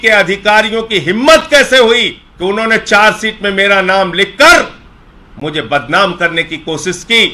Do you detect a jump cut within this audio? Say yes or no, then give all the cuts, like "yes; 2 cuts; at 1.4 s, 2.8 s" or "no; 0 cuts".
yes; 1 cut; at 2.2 s